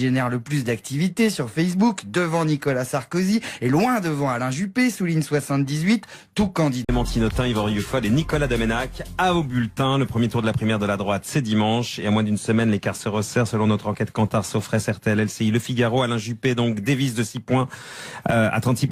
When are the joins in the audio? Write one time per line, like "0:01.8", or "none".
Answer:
none